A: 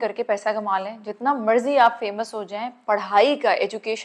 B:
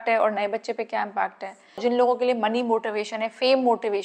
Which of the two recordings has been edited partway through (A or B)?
B